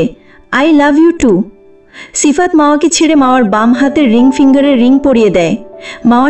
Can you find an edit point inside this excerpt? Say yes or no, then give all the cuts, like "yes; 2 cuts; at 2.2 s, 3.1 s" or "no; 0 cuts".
no; 0 cuts